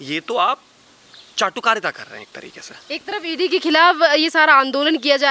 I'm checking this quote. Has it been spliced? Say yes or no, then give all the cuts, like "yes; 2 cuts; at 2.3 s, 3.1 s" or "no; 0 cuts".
no; 0 cuts